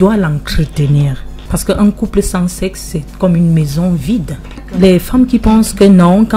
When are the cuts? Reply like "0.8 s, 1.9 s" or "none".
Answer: 1.4 s, 4.6 s